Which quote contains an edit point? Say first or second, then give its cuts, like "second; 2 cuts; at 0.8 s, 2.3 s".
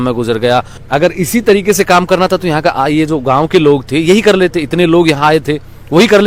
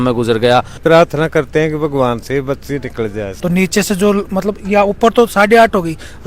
second; 2 cuts; at 0.8 s, 3.3 s